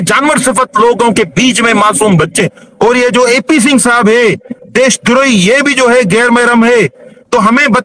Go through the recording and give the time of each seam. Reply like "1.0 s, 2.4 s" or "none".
2.4 s